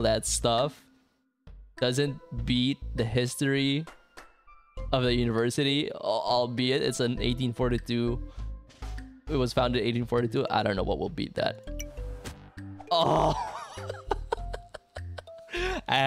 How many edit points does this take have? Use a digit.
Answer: 0